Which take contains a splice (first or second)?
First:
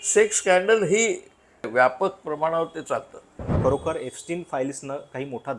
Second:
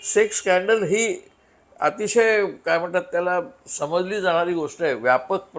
first